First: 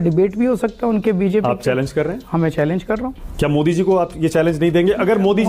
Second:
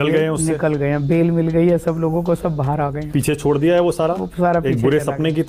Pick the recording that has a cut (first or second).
first